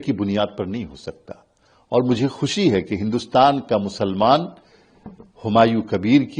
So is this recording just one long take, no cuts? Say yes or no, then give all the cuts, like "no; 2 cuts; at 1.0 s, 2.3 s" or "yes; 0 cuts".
yes; 0 cuts